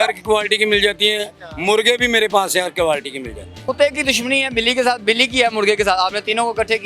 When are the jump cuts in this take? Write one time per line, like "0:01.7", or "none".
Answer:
0:03.7